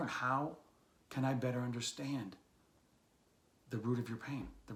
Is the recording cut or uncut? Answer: uncut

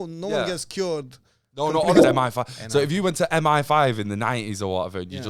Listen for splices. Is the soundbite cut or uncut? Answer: cut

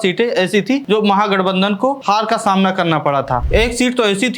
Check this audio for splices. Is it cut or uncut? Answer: cut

